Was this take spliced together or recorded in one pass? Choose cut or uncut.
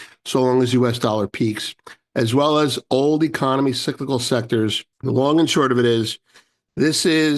cut